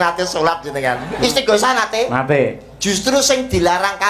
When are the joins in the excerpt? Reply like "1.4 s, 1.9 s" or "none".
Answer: 1.1 s